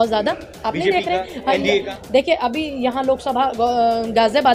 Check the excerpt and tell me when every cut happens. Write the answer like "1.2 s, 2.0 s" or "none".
none